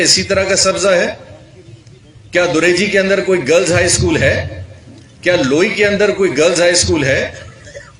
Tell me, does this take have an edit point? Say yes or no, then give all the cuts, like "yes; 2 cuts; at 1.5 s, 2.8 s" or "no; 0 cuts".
no; 0 cuts